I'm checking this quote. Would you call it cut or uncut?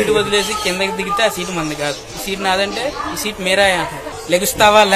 cut